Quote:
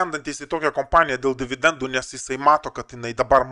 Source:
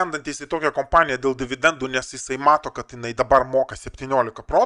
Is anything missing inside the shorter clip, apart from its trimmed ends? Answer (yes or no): no